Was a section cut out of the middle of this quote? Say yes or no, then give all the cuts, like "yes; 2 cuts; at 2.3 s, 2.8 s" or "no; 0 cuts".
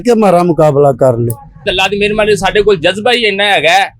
yes; 1 cut; at 1.7 s